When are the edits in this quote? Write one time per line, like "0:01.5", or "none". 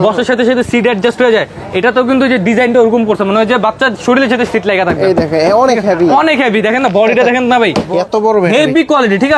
0:07.8